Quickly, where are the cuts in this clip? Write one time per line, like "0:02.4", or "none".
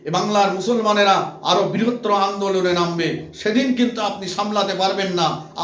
none